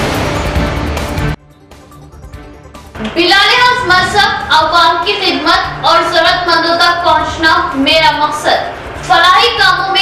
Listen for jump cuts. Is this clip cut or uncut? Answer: cut